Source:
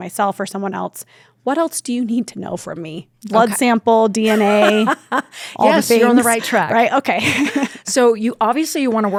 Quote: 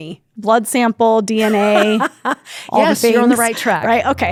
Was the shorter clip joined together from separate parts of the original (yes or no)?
no